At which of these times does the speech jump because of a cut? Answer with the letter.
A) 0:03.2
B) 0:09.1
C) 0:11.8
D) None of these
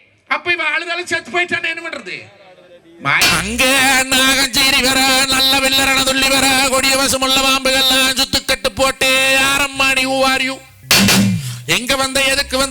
A